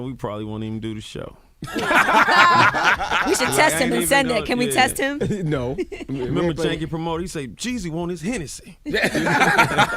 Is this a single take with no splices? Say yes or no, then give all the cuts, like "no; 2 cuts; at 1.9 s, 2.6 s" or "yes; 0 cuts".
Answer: no; 1 cut; at 3.5 s